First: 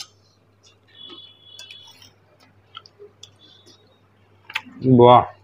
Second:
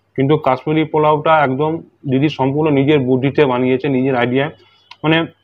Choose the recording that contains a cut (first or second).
first